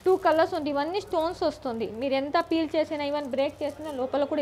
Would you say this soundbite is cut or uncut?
uncut